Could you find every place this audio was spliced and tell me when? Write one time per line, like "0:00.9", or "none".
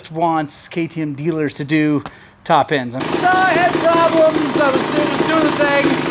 0:03.0